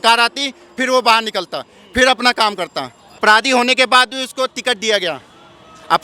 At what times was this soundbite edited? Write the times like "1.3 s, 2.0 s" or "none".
3.2 s